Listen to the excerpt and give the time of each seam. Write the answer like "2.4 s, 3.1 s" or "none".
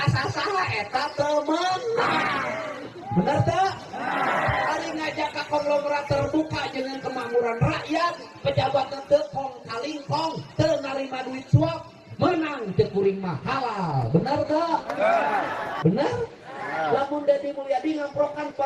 15.7 s